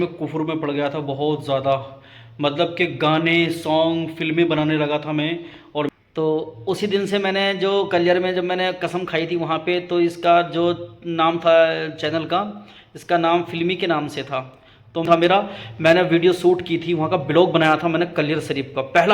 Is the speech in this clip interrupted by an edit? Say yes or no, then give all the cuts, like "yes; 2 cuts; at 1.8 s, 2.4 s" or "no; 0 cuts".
yes; 2 cuts; at 5.9 s, 15.1 s